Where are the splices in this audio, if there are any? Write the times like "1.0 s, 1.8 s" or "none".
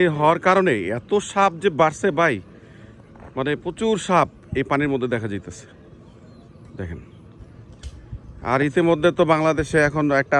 none